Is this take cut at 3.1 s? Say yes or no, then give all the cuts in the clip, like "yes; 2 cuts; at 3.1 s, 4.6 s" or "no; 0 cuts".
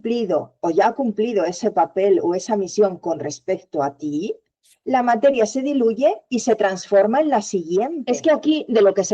no; 1 cut; at 8.0 s